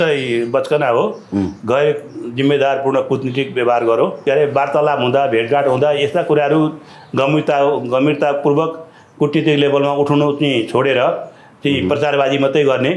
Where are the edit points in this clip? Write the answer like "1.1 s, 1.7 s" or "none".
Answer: 4.2 s